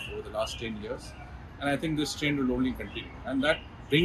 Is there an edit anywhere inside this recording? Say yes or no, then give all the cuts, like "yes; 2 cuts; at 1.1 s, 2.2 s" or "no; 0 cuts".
no; 0 cuts